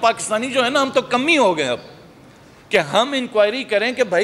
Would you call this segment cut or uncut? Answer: uncut